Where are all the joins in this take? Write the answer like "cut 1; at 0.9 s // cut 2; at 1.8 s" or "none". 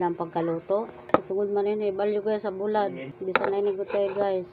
cut 1; at 1.0 s // cut 2; at 3.1 s